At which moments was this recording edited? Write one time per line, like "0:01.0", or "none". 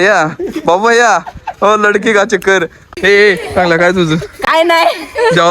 0:02.7